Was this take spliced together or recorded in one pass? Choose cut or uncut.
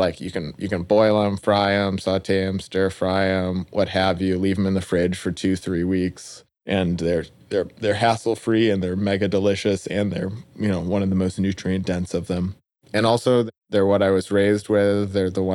uncut